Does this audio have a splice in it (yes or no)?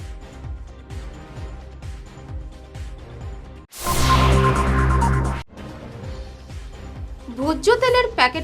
yes